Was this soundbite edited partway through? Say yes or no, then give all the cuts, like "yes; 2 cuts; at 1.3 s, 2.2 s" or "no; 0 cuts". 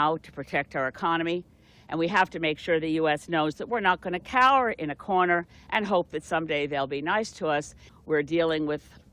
yes; 1 cut; at 7.8 s